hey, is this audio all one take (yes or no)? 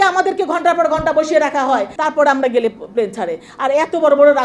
no